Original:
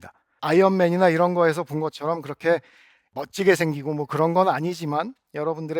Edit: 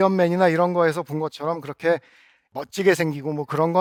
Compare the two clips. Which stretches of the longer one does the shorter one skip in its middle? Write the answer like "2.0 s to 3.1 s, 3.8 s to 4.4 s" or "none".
none